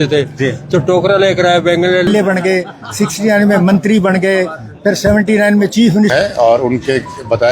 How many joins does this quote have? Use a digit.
2